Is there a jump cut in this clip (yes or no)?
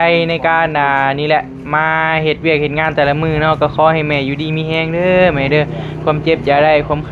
no